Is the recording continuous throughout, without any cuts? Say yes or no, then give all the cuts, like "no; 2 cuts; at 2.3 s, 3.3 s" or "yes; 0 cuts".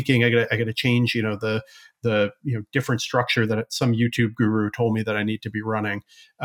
yes; 0 cuts